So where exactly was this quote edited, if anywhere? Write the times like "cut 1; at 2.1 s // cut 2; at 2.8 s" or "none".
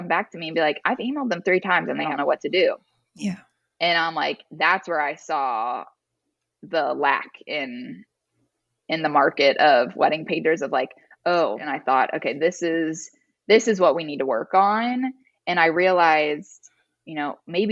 cut 1; at 2.1 s // cut 2; at 11.7 s